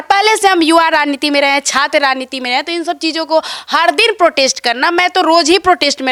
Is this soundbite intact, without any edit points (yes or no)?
yes